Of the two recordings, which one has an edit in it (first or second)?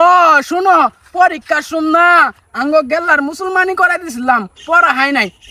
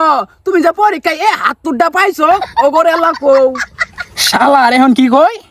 second